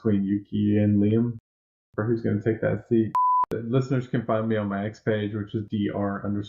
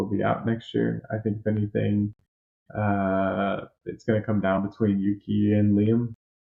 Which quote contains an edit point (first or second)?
first